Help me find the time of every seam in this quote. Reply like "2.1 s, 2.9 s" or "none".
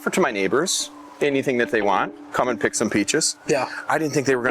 none